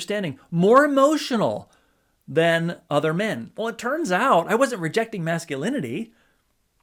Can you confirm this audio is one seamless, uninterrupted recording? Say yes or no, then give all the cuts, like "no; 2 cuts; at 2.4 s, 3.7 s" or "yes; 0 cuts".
yes; 0 cuts